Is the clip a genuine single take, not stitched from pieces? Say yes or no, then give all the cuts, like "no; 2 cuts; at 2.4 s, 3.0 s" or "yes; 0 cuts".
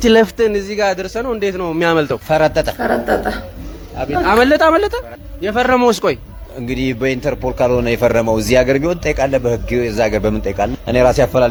yes; 0 cuts